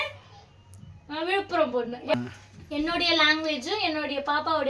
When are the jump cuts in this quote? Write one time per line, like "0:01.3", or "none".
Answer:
0:02.1